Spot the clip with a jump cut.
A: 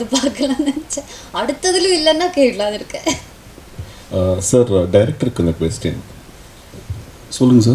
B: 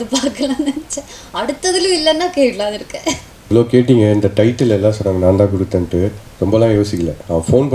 B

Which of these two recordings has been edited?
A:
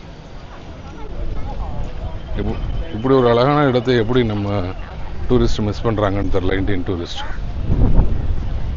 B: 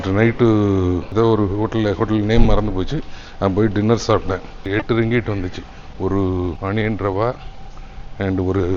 B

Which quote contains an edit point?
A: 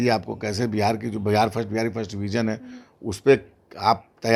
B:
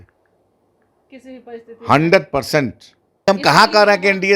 B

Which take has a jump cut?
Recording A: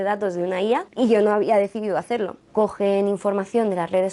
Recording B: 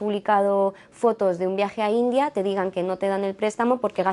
A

